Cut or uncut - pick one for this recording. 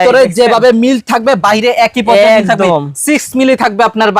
uncut